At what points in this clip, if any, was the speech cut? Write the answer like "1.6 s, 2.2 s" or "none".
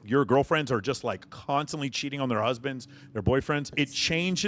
1.3 s, 3.7 s